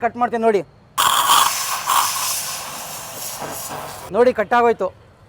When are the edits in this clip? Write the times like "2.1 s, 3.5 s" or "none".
0.9 s, 4.0 s